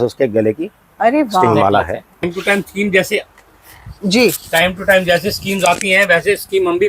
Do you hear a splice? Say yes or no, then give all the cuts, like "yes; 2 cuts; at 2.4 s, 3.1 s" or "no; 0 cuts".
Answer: yes; 1 cut; at 2.2 s